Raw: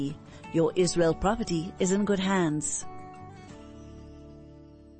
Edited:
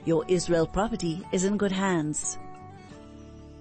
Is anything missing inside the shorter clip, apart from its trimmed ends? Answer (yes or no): yes